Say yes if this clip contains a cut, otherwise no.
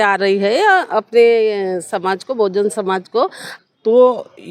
yes